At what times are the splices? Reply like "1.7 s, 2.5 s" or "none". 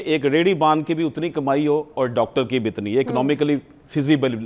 none